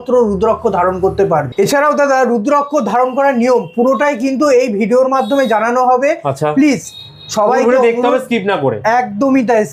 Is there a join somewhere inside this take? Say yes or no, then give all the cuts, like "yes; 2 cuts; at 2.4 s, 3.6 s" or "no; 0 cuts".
no; 0 cuts